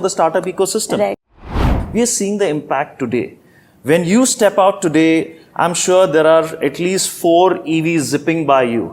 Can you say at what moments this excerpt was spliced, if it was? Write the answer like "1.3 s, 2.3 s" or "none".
1.6 s

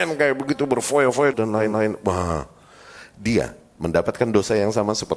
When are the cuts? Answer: none

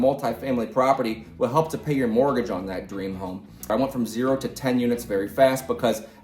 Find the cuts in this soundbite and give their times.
3.7 s

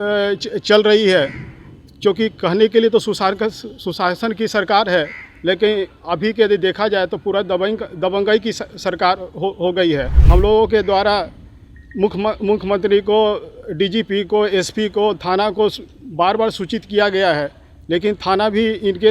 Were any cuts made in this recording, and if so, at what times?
10.1 s

